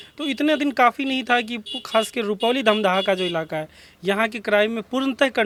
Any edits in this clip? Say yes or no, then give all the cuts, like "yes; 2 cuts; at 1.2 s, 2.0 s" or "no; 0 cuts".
no; 0 cuts